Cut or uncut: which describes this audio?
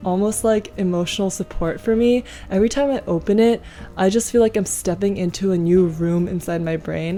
uncut